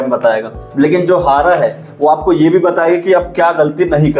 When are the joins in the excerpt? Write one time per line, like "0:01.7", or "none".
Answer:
none

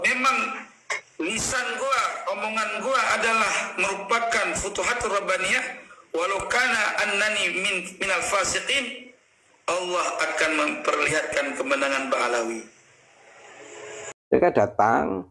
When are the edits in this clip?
0:14.1

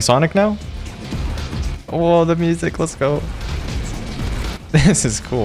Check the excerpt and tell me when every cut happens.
0:03.5

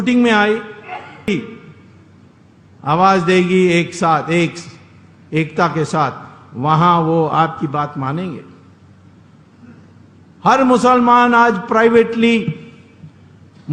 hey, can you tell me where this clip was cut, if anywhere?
0:01.3

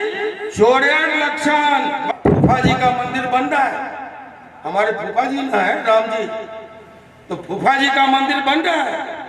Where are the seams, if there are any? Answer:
0:02.0

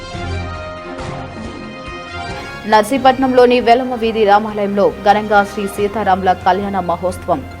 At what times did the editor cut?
none

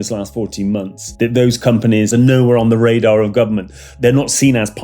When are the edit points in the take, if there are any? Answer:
0:01.0
0:02.1
0:03.9

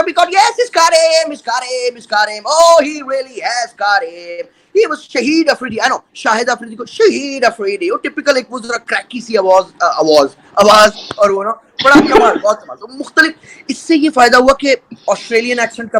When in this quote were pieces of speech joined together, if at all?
none

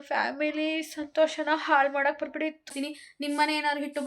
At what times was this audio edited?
0:02.7

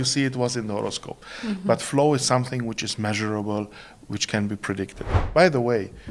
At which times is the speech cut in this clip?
0:05.2

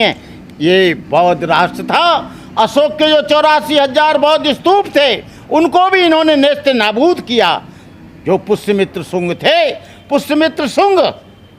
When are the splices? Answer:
none

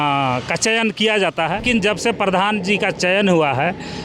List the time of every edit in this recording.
0:01.6

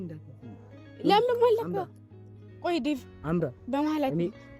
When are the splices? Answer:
none

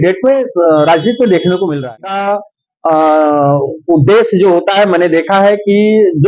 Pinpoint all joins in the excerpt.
0:02.0

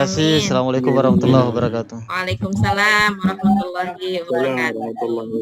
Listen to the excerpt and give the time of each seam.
0:02.0

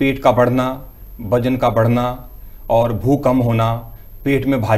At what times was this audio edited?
none

